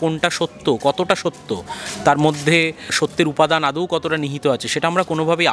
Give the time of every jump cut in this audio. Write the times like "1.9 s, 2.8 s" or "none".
2.9 s